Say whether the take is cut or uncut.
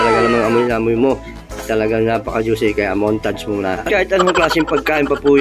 cut